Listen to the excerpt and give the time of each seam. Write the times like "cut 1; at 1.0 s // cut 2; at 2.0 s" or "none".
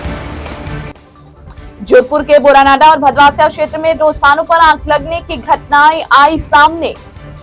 none